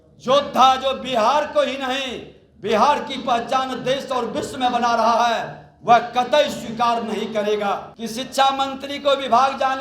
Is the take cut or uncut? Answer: cut